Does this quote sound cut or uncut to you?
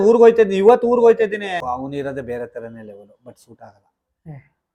cut